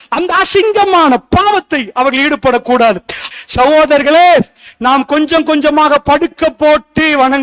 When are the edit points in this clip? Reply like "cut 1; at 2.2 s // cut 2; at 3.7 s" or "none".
cut 1; at 3.2 s